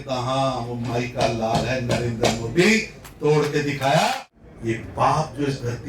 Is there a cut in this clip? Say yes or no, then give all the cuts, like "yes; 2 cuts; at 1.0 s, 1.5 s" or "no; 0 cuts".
yes; 1 cut; at 4.2 s